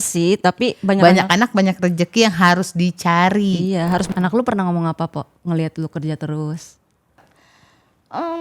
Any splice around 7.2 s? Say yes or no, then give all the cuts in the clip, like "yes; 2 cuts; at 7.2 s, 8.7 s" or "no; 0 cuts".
yes; 2 cuts; at 4.1 s, 7.2 s